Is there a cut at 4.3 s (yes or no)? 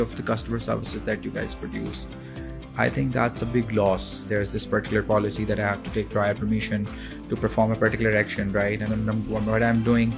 yes